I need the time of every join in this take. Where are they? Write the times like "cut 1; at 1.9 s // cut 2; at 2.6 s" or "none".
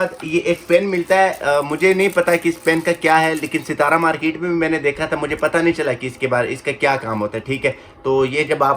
none